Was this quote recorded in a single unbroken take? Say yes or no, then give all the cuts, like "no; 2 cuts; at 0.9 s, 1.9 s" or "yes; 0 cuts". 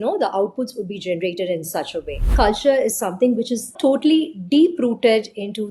no; 1 cut; at 2.3 s